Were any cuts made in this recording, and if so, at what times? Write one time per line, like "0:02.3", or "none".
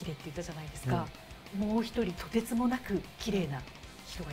none

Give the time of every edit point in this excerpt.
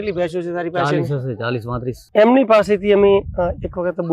0:02.0

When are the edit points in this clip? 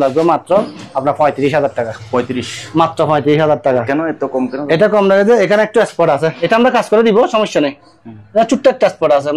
none

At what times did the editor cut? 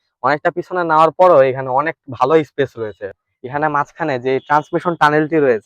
0:03.1

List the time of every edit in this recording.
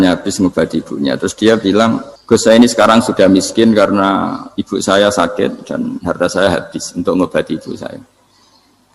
0:02.1

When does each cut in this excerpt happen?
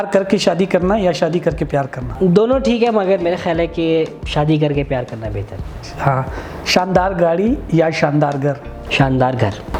none

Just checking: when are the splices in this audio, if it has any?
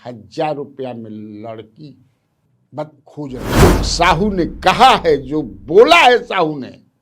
0:03.6

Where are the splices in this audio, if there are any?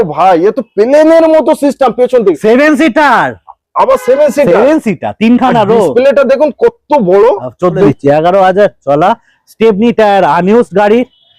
0:07.9

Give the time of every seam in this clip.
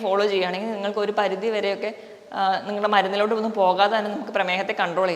none

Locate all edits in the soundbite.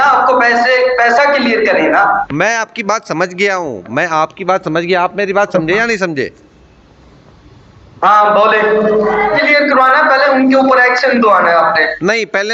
0:09.3

